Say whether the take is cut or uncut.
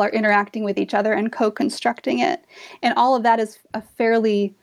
uncut